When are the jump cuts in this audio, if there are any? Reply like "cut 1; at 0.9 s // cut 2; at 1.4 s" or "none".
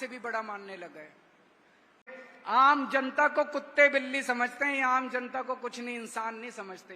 cut 1; at 2.1 s